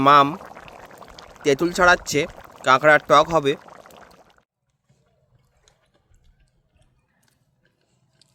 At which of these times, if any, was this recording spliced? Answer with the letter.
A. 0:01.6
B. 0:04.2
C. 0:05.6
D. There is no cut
B